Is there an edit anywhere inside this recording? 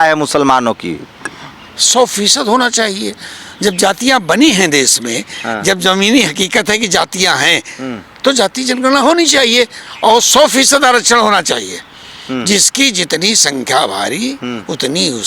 no; 0 cuts

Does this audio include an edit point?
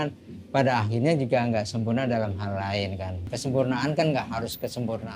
yes; 1 cut; at 3.3 s

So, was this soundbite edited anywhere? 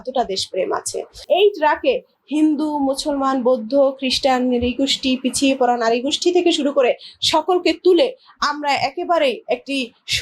yes; 1 cut; at 1.2 s

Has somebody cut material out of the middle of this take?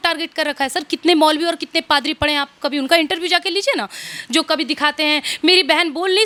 no; 0 cuts

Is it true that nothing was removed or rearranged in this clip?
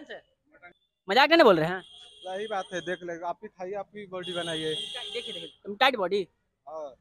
yes; 0 cuts

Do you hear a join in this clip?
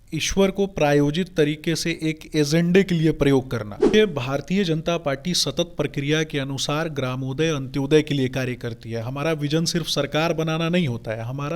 yes; 1 cut; at 3.9 s

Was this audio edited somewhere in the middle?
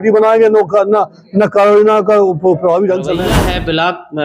yes; 1 cut; at 3.3 s

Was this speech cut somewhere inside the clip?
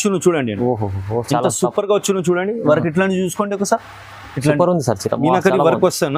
no; 0 cuts

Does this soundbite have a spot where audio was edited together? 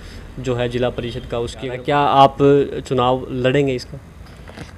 yes; 1 cut; at 1.5 s

